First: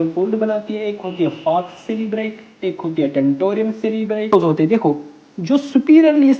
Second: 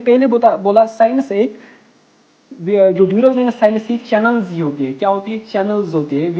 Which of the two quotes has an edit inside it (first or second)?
first